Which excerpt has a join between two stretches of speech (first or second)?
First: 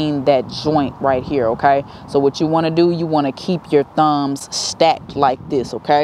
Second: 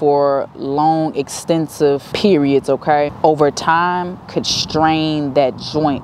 second